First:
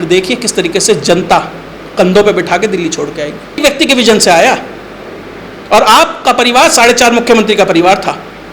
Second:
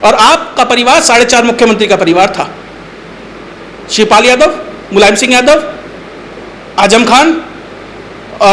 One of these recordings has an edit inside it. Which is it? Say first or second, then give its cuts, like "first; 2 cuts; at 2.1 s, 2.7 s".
first; 1 cut; at 3.6 s